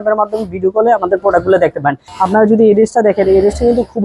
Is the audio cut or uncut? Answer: cut